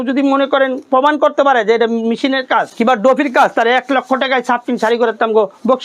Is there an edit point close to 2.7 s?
yes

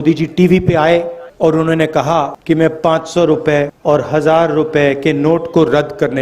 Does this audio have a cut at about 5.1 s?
no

